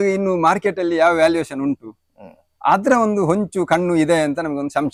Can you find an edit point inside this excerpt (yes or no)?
no